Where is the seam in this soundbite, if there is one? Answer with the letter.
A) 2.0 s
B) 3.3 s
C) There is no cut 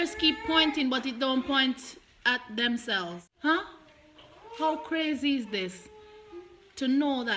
B